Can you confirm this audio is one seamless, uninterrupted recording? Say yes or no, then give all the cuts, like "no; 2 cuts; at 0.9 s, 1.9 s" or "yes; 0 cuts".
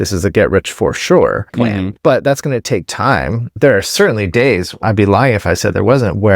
no; 3 cuts; at 1.6 s, 3.6 s, 4.8 s